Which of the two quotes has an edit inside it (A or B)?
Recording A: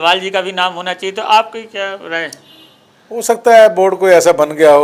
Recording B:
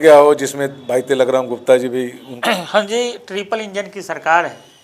B